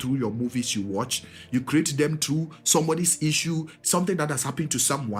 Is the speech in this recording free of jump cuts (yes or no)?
yes